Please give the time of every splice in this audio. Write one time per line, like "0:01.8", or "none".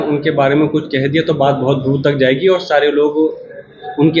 none